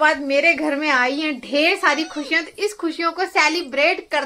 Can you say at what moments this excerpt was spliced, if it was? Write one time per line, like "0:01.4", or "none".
none